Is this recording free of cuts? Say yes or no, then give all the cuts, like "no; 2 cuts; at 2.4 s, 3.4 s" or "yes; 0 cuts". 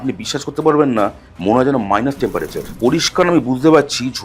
no; 1 cut; at 2.6 s